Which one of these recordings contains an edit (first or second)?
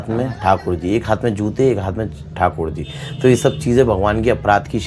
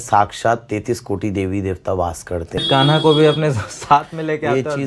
second